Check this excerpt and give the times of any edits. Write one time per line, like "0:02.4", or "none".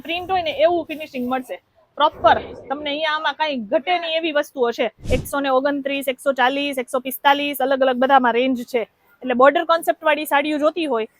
0:05.0